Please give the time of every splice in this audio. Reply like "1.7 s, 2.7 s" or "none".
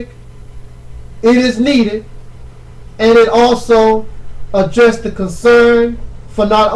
2.6 s